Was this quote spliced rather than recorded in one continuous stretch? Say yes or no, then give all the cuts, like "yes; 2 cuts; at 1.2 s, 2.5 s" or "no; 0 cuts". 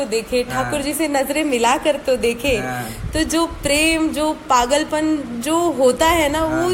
no; 0 cuts